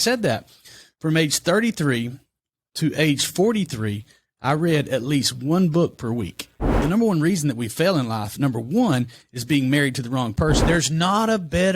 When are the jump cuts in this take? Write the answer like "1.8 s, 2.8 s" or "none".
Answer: 6.7 s, 10.6 s